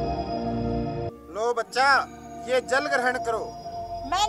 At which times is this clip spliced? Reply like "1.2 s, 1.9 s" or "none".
1.1 s